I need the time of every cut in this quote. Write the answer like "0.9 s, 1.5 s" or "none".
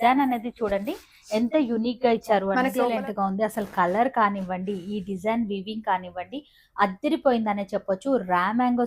2.8 s